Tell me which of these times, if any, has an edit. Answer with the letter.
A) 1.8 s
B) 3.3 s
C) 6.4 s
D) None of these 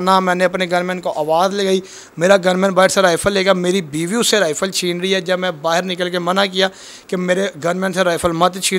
D